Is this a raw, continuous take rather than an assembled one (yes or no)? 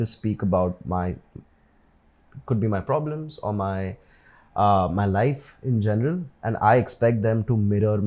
yes